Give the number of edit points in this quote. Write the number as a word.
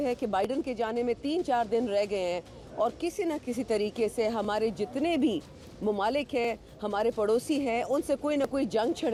zero